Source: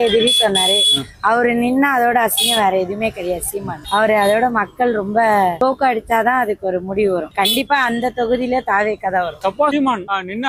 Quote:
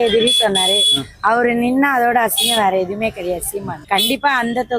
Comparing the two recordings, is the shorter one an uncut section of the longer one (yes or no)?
no